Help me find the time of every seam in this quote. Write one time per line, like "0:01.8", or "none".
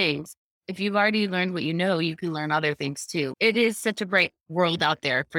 0:04.4